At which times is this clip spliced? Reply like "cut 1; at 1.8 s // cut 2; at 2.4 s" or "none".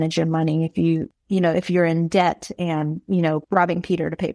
cut 1; at 1.0 s // cut 2; at 3.4 s